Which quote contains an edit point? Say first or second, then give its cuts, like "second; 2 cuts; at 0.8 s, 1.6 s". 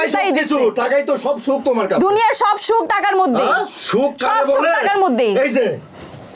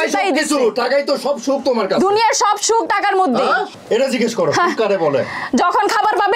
second; 1 cut; at 3.7 s